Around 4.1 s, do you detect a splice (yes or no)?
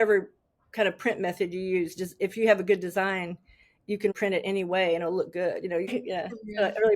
yes